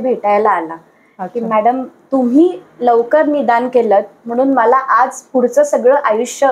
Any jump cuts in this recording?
no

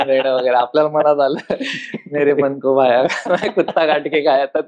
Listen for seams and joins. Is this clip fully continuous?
yes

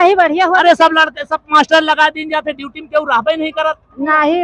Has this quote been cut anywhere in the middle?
no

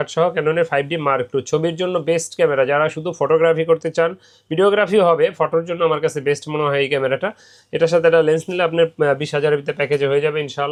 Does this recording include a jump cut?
no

